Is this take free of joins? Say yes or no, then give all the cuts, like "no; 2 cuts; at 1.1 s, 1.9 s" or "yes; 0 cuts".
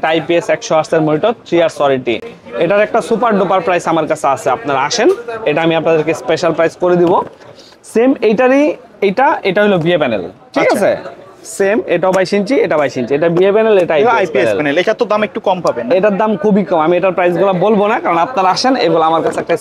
yes; 0 cuts